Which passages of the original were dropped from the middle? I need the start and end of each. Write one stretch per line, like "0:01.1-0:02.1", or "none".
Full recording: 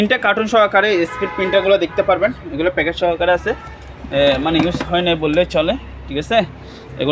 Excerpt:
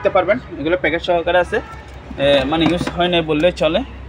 none